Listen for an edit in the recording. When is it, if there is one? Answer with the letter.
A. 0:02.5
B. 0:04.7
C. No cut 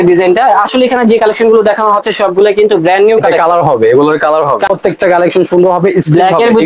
B